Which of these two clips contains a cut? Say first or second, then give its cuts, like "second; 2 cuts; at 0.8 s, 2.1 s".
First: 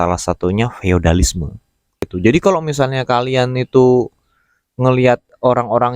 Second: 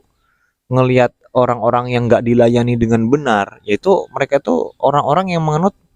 first; 1 cut; at 2.1 s